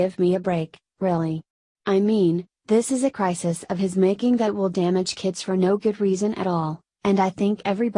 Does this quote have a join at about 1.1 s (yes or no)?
yes